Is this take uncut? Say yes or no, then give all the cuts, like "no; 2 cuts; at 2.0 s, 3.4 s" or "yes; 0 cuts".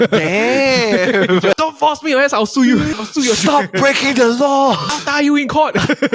no; 3 cuts; at 1.6 s, 2.9 s, 4.9 s